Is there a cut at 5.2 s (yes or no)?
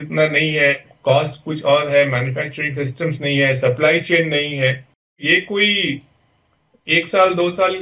yes